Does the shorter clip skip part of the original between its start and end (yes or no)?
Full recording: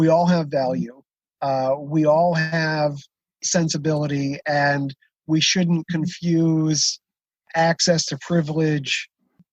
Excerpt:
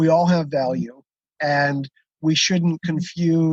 yes